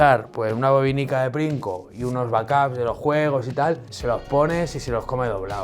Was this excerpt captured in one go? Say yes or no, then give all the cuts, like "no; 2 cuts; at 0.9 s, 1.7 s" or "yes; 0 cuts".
no; 1 cut; at 3.9 s